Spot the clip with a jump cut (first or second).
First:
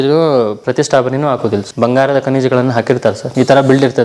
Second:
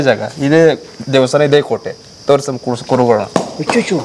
first